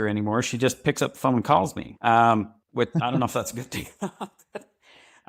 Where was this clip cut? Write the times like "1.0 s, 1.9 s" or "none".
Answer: none

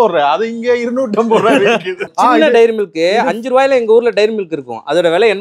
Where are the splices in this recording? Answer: 2.1 s

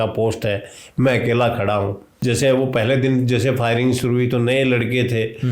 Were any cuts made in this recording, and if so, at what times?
2.1 s

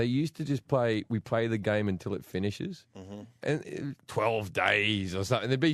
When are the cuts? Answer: 4.4 s

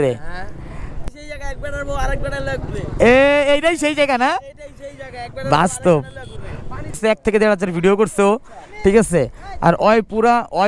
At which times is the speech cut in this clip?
1.1 s, 7.0 s

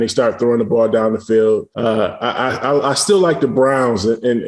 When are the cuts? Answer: 1.7 s

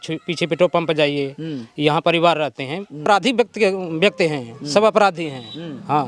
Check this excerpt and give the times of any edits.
3.0 s

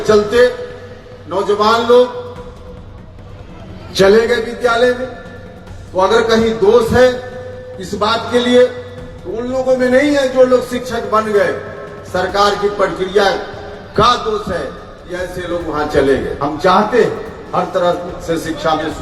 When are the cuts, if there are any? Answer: 16.3 s

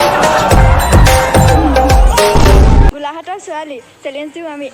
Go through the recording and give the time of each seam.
2.9 s

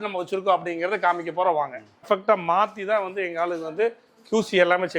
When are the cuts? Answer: 2.0 s

